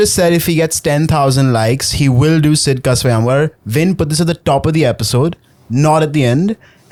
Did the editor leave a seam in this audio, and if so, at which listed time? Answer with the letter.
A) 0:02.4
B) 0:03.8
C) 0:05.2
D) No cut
D